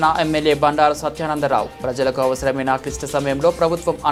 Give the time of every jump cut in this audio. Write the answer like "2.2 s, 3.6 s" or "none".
none